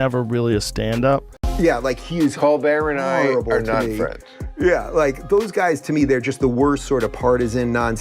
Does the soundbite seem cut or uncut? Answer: cut